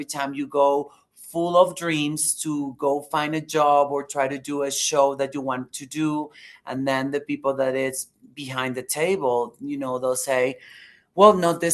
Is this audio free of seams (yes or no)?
yes